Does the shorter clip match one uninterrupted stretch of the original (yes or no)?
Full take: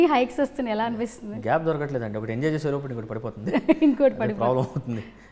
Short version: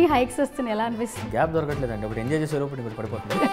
no